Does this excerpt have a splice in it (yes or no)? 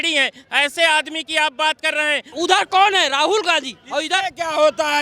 yes